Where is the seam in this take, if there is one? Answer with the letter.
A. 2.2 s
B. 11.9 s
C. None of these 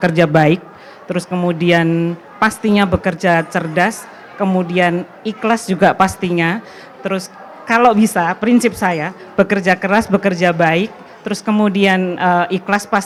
C